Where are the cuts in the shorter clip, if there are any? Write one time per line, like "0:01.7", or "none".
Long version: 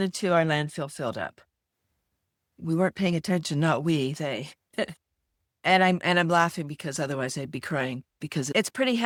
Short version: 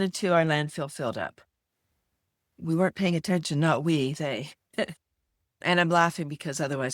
0:05.6